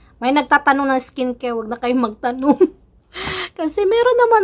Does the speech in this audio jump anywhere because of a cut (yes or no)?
no